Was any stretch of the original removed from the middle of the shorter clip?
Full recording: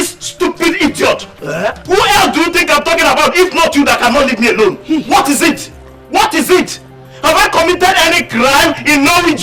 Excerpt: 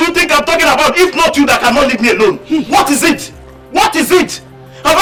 no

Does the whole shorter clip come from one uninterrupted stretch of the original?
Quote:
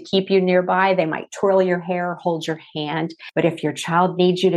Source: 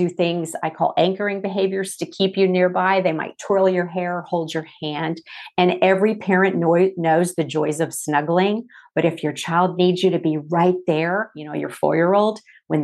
no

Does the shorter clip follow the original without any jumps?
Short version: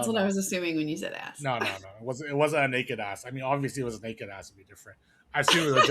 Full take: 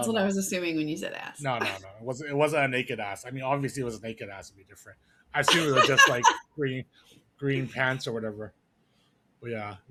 yes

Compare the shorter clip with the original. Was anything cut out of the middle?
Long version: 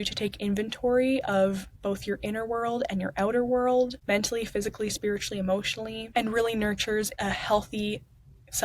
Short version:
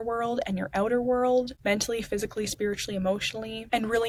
no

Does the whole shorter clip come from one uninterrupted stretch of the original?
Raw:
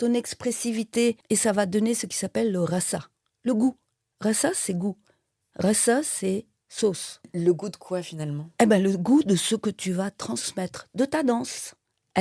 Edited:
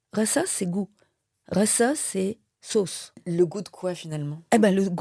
yes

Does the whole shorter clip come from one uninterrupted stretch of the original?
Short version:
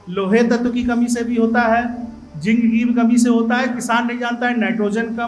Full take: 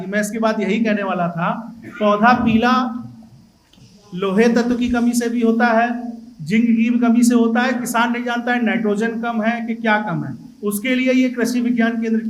yes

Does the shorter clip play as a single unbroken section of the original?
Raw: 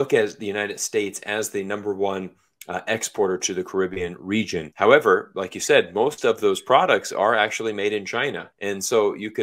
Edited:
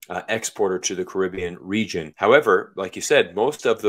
yes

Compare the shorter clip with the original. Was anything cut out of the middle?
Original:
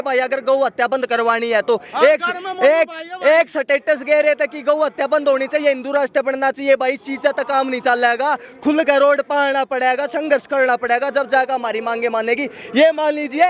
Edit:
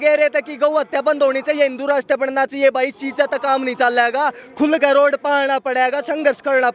no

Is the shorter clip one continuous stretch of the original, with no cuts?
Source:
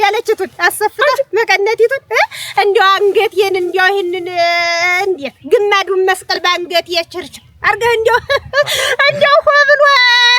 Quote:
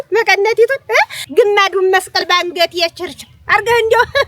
no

